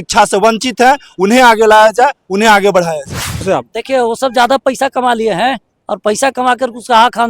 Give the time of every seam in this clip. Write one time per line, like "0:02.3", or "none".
0:03.4